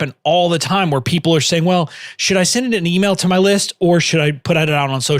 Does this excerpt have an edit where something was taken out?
yes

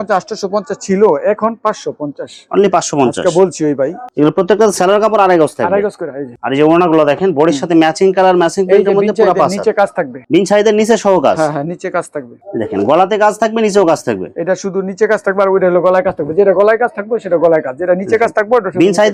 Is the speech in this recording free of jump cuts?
yes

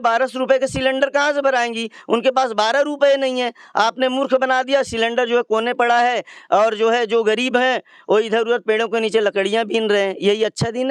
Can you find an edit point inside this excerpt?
no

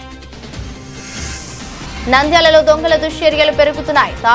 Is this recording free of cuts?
yes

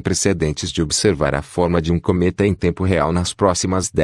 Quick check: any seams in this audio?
yes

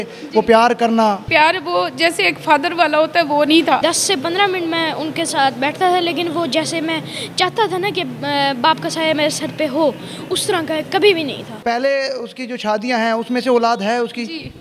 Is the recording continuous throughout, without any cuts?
no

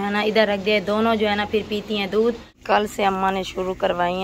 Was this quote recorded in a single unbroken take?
no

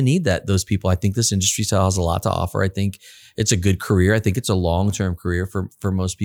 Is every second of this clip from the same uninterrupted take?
yes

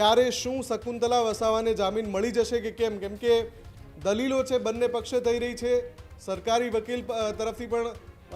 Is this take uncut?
yes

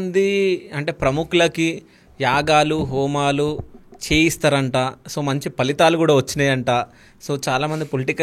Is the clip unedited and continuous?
yes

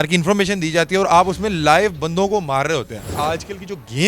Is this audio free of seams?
no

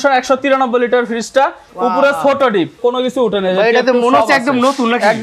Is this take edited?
yes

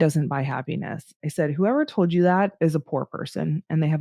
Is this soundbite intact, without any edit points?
no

